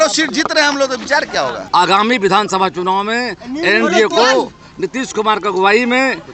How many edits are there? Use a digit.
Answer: 1